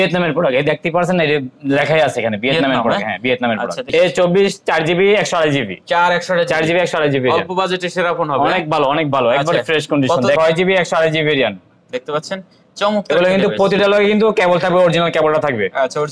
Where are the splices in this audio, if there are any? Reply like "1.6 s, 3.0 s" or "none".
3.8 s, 10.4 s

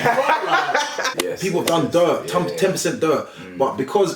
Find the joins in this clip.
1.2 s

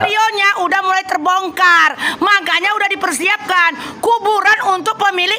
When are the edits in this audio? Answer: none

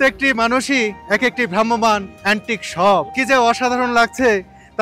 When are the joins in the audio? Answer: 1.0 s, 2.1 s, 3.1 s

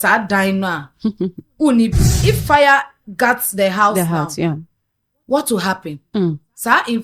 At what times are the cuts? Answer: 2.1 s

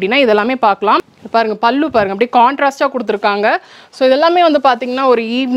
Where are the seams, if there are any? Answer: 1.1 s

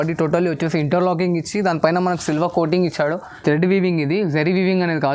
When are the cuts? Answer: 3.4 s

